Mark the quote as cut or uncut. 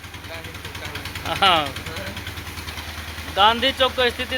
uncut